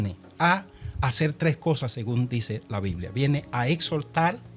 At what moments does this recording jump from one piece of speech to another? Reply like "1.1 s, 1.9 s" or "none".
none